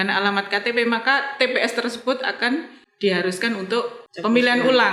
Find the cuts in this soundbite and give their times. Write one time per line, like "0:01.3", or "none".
0:02.8
0:04.0